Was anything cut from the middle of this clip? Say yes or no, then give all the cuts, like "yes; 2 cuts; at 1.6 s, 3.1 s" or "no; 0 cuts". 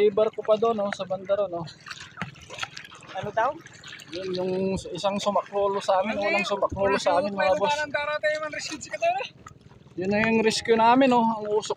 no; 0 cuts